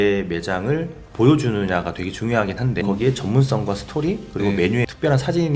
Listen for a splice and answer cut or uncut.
cut